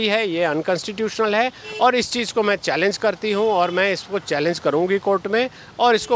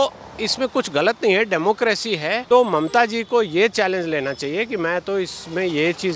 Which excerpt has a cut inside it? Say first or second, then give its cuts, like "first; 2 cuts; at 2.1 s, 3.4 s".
second; 1 cut; at 2.4 s